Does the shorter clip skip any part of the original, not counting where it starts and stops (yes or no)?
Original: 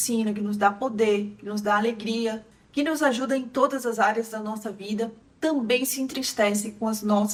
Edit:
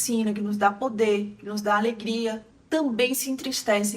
yes